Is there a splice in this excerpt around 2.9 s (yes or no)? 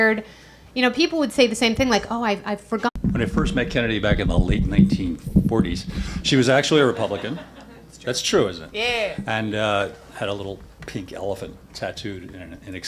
no